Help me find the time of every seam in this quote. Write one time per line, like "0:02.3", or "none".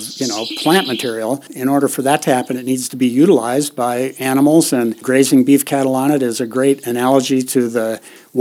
0:01.5
0:05.0